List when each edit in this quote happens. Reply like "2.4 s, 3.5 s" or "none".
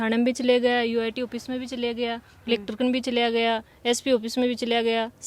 none